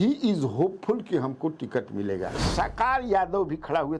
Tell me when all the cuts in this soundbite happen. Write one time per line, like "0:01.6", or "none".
0:02.4